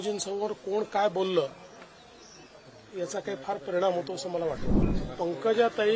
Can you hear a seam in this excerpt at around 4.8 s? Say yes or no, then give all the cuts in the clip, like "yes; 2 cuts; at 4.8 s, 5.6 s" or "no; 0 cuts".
yes; 1 cut; at 4.8 s